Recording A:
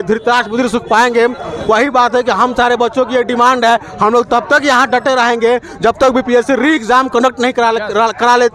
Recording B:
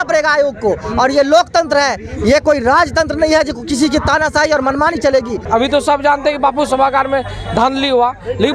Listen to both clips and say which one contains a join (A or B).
B